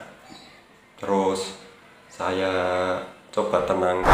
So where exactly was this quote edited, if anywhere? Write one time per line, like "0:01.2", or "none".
none